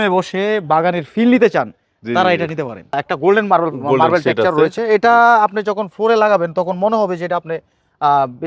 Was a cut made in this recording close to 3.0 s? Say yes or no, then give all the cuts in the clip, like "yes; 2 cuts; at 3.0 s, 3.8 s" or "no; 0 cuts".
yes; 1 cut; at 3.0 s